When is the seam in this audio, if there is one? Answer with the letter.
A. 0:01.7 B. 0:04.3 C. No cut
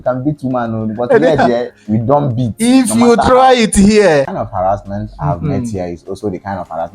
B